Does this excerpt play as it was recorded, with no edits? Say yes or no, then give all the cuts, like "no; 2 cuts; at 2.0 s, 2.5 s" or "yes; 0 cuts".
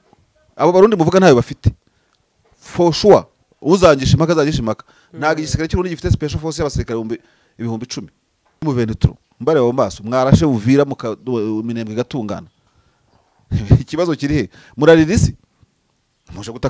no; 1 cut; at 8.6 s